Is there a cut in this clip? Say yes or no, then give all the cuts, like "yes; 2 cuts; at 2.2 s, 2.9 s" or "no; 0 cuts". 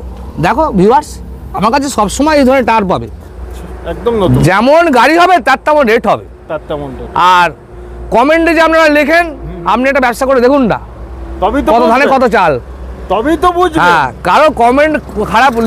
no; 0 cuts